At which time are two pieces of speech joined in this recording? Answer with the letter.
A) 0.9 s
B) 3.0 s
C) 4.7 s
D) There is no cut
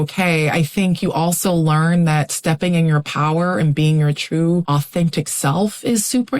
C